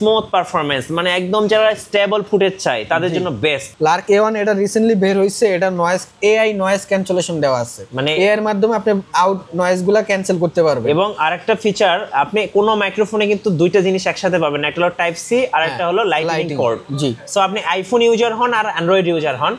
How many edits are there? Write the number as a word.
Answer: one